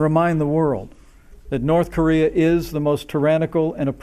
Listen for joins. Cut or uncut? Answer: uncut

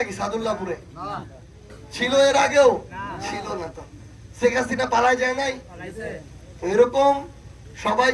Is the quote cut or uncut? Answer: uncut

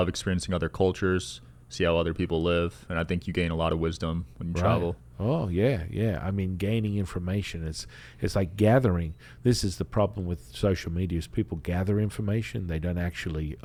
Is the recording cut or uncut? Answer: uncut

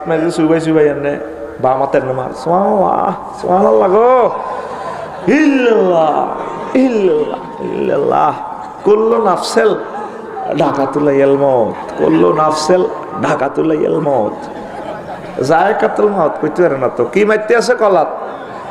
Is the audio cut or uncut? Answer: uncut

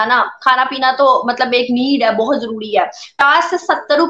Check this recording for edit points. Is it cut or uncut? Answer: cut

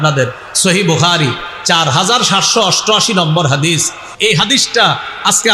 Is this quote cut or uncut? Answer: cut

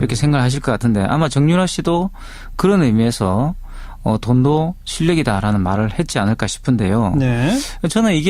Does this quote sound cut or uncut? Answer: cut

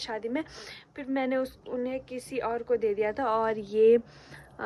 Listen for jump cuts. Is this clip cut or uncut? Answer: uncut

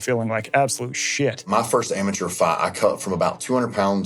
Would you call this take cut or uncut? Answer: cut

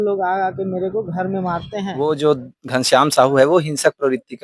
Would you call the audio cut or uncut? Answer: cut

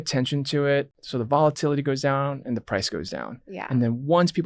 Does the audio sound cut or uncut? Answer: cut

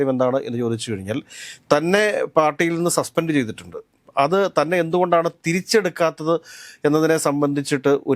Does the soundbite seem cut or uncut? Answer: uncut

